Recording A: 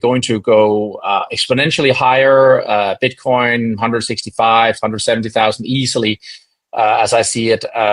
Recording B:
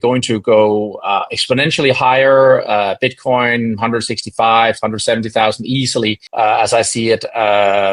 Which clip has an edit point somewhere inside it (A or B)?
B